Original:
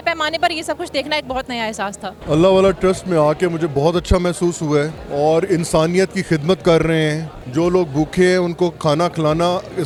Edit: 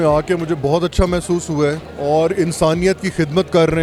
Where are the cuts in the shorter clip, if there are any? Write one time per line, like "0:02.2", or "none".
none